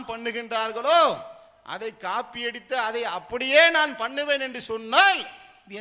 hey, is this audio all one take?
yes; 0 cuts

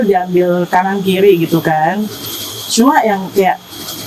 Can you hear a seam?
no; 0 cuts

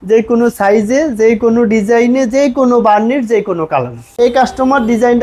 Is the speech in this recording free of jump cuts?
no; 1 cut; at 4.0 s

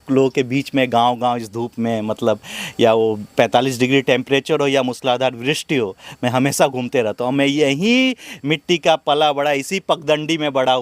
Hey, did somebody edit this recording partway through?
no; 0 cuts

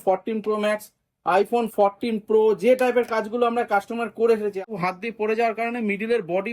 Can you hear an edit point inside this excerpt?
yes; 1 cut; at 4.6 s

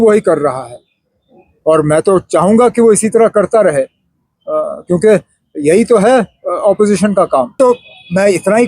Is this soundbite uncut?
no; 1 cut; at 7.6 s

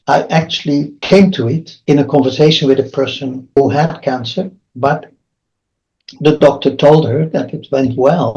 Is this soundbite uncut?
no; 3 cuts; at 1.0 s, 1.7 s, 3.6 s

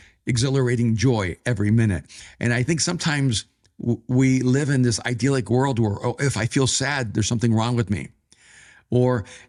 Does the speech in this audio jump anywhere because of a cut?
no; 0 cuts

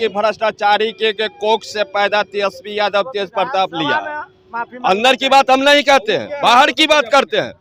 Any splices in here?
no; 0 cuts

